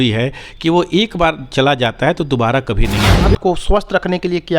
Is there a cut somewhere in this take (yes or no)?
yes